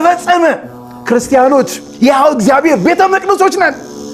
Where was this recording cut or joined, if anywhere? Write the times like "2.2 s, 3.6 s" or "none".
1.8 s